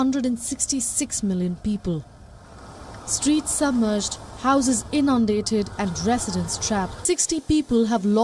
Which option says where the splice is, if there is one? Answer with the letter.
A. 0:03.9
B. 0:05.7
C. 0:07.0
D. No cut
C